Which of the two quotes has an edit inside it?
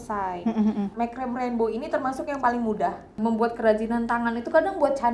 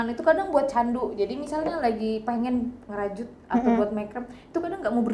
first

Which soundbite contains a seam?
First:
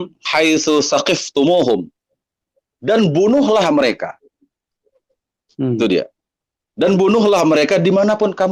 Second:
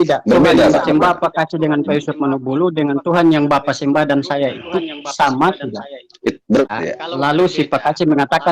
second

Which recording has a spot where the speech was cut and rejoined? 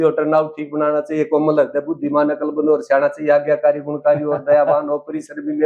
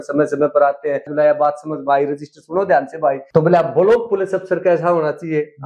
second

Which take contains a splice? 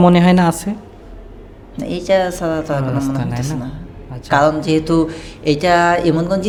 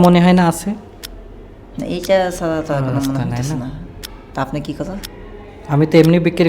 second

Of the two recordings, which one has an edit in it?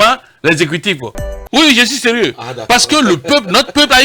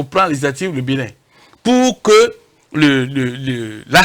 first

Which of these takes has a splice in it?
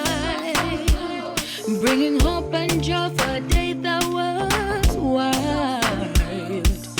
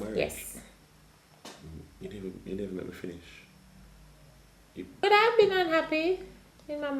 second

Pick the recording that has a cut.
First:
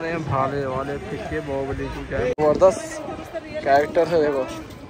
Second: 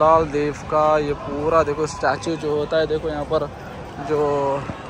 first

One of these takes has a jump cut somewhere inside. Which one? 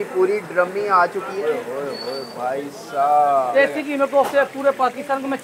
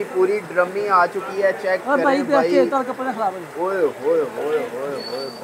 first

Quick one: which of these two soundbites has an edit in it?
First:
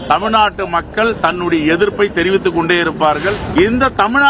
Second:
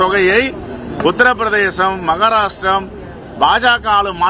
first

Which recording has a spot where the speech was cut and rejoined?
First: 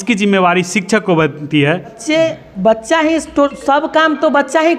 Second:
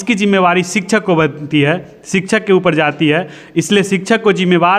first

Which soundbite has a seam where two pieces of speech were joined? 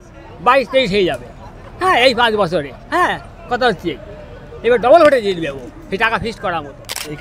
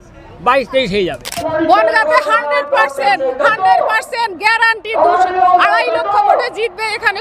second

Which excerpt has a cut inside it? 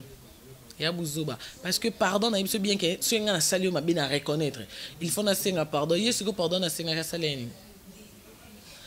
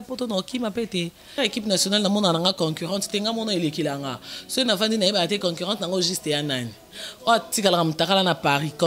second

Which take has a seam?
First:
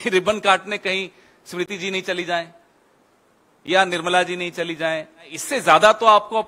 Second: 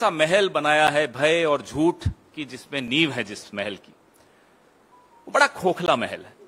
first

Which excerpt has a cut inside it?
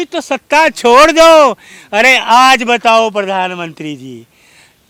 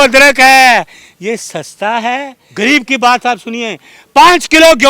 second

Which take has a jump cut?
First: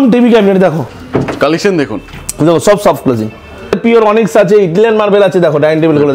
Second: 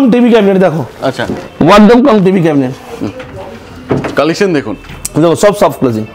first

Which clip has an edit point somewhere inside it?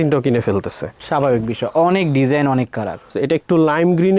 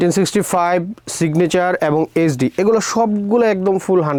first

